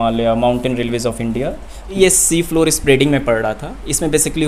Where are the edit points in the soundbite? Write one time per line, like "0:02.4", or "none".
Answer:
0:02.0